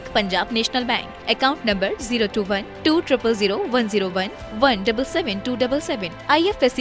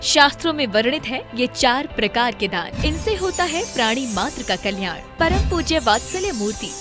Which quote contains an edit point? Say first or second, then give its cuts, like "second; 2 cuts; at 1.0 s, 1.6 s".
second; 1 cut; at 2.8 s